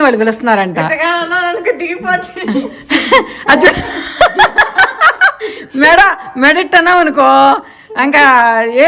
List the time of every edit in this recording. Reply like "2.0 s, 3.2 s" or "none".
none